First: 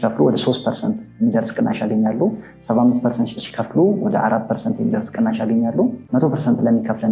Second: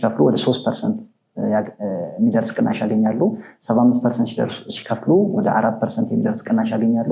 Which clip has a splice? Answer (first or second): first